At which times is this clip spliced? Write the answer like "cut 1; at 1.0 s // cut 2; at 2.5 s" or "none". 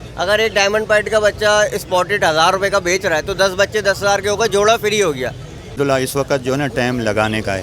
cut 1; at 5.7 s